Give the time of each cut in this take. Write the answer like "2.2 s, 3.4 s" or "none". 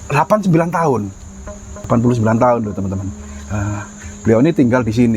1.8 s